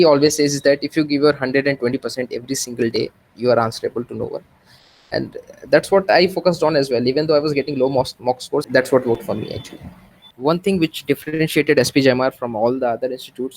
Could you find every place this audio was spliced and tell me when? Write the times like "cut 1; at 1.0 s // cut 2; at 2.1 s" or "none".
cut 1; at 8.7 s // cut 2; at 10.3 s